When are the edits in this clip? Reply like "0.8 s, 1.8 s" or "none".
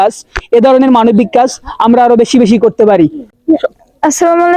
3.3 s